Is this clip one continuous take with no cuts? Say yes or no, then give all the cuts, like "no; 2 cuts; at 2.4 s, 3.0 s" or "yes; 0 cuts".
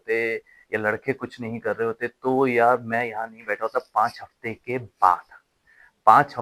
yes; 0 cuts